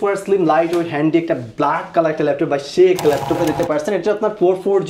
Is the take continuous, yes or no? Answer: no